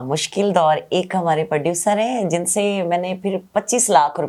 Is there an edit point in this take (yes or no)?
no